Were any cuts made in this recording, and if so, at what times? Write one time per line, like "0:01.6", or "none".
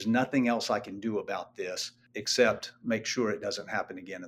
0:01.9